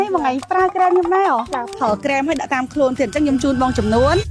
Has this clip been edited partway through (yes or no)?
yes